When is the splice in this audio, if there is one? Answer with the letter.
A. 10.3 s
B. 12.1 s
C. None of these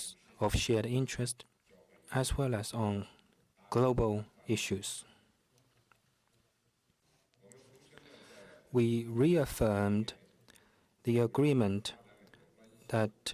B